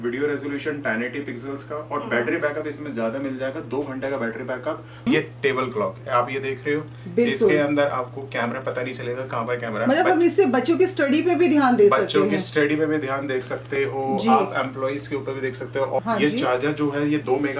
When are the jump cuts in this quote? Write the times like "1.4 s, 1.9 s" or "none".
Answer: 5.1 s, 16.0 s